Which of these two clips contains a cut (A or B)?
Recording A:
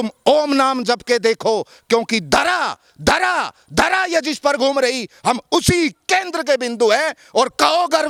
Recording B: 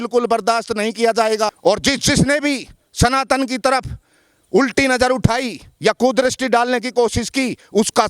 B